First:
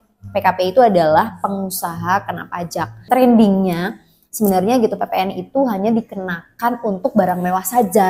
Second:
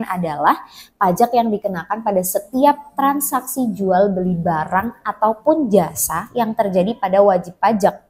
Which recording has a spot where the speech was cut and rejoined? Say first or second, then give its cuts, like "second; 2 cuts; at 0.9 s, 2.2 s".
first; 1 cut; at 3.1 s